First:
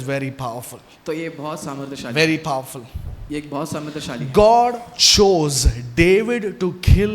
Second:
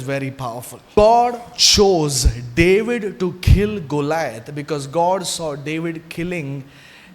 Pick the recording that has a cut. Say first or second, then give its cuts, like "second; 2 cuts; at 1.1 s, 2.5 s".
second; 1 cut; at 0.9 s